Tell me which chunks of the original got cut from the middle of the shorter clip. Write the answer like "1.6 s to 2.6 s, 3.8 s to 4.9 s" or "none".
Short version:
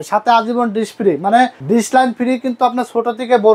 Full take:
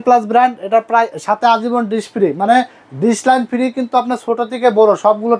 2.7 s to 2.9 s

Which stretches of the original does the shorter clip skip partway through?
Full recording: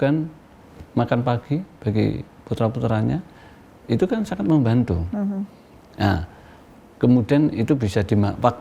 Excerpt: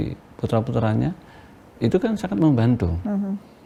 none

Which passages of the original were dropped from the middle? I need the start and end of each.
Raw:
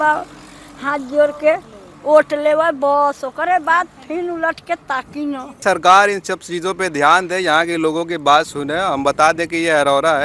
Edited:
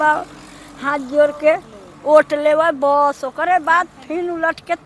none

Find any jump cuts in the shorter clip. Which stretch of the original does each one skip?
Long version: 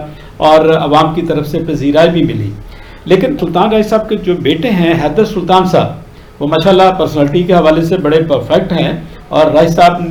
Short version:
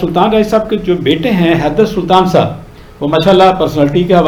none

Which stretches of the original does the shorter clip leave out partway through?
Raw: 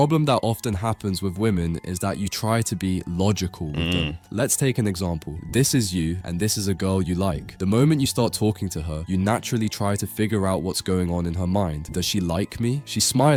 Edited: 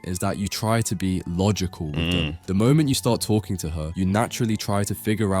4.2 s to 7.5 s

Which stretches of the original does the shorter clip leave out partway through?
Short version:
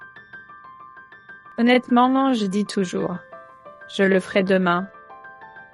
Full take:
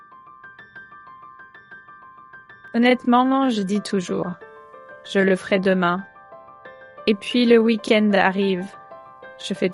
2.0 s to 2.7 s

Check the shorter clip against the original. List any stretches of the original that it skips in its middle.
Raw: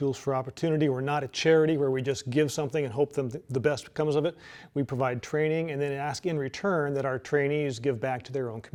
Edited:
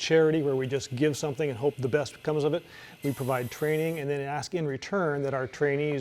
3.1 s to 3.5 s

